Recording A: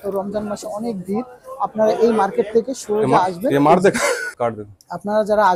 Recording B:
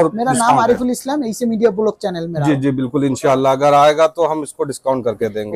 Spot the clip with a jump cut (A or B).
A